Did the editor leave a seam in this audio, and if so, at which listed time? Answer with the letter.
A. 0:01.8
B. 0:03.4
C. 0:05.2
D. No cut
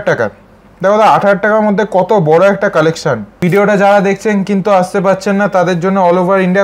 B